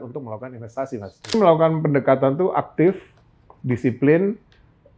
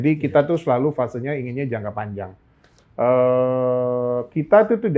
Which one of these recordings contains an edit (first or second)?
first